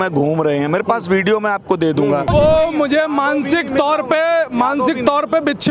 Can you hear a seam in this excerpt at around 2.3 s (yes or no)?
yes